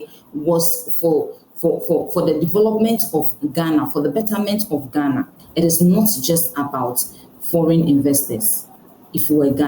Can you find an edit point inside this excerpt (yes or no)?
yes